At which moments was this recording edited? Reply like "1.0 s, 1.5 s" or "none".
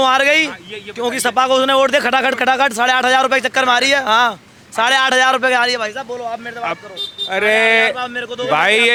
none

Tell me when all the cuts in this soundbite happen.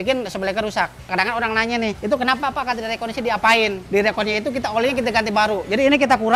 1.0 s, 2.0 s, 3.8 s

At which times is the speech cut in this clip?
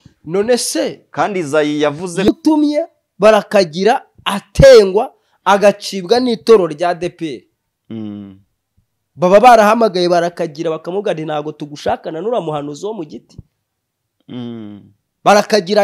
2.3 s

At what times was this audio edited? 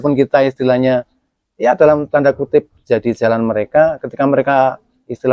none

